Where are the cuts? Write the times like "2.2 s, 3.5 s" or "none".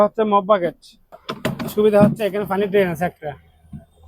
1.2 s